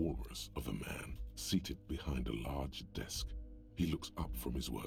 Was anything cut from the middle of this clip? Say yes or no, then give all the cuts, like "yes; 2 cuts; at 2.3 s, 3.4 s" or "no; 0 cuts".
no; 0 cuts